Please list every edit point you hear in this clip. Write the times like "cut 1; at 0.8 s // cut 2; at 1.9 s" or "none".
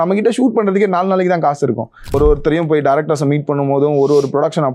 cut 1; at 2.1 s